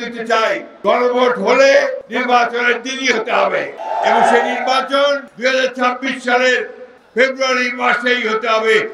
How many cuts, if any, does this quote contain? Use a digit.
3